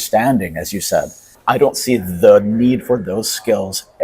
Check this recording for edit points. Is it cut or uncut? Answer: cut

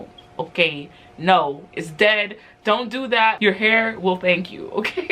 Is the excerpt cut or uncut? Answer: cut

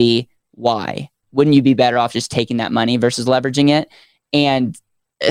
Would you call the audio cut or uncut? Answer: cut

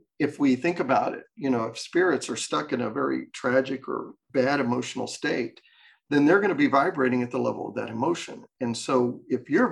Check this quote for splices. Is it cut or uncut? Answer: cut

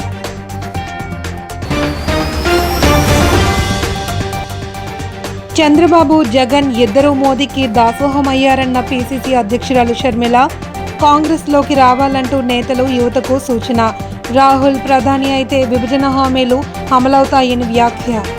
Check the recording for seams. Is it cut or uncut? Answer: uncut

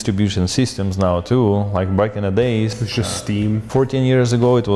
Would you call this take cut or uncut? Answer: uncut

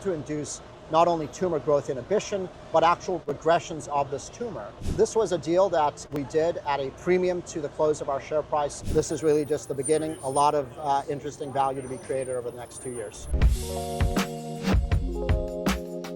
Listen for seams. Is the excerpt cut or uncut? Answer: cut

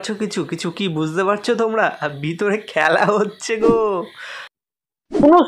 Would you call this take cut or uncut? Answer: uncut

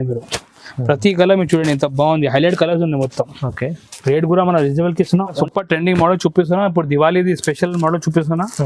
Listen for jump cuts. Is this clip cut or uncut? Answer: cut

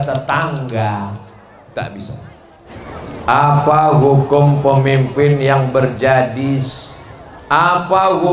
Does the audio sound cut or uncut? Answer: cut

